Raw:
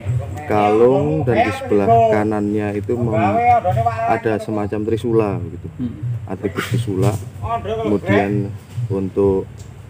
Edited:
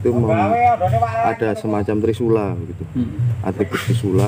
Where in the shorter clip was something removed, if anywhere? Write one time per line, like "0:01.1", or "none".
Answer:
none